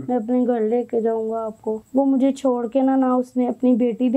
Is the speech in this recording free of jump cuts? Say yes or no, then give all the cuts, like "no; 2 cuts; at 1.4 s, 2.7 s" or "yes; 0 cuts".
no; 1 cut; at 1.8 s